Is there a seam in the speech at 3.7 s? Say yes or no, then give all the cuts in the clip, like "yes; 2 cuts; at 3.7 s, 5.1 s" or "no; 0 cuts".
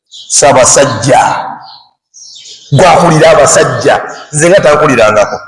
no; 0 cuts